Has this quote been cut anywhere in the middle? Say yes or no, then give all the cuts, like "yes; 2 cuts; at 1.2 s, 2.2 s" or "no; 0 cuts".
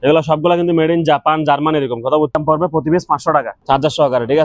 yes; 2 cuts; at 2.4 s, 3.5 s